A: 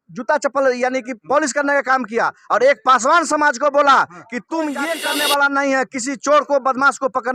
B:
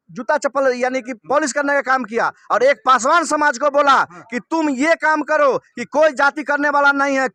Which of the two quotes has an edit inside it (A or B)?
A